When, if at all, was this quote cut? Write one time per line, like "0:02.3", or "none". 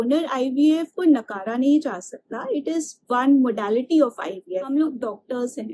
0:04.7